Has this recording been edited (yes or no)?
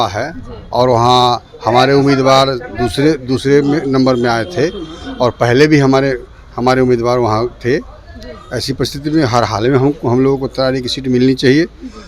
no